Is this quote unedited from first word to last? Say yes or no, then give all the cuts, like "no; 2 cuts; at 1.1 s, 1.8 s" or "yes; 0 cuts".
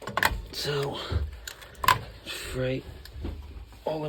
yes; 0 cuts